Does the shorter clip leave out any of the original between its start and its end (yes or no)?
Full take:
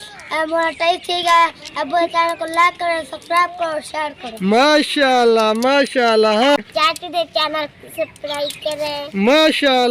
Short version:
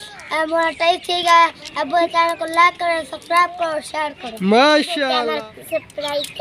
yes